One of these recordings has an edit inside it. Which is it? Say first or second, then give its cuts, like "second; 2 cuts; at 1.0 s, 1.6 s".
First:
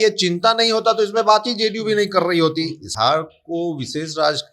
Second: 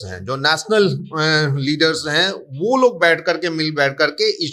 first; 1 cut; at 2.9 s